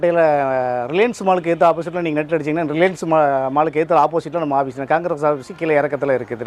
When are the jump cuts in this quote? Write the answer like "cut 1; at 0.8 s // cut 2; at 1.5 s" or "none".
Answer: none